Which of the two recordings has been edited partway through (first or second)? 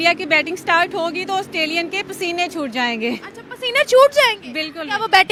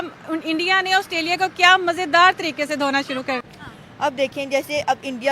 second